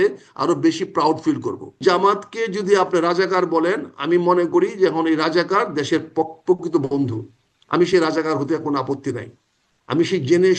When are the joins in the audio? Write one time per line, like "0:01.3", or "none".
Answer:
0:01.8